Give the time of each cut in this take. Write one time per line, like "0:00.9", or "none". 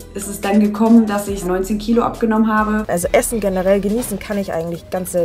0:02.8